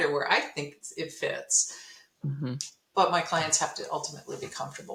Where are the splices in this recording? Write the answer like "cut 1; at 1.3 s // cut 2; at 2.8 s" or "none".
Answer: none